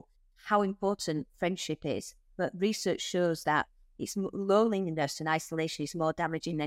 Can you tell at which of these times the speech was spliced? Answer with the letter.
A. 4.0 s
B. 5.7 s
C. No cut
C